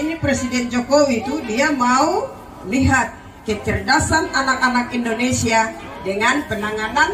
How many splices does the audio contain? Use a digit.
0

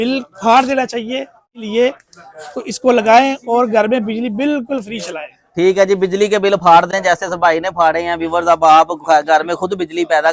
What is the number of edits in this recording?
1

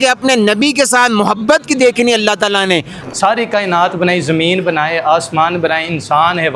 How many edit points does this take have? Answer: 1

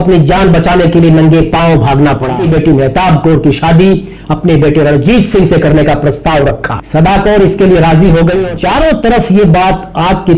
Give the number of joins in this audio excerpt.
2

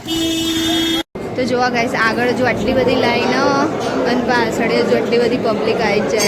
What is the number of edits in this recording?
1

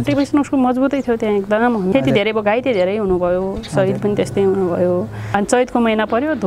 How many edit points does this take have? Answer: 2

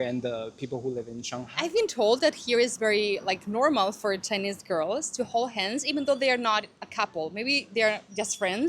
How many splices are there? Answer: 1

